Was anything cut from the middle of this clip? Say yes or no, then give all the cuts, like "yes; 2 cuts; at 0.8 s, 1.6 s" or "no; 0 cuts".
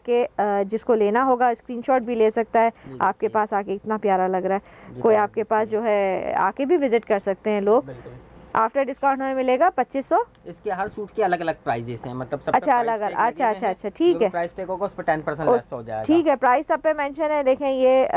no; 0 cuts